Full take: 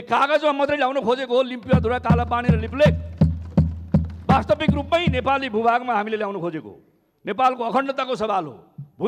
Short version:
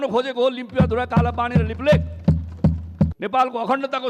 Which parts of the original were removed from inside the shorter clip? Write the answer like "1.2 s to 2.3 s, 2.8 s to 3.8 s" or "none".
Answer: 4.1 s to 7.2 s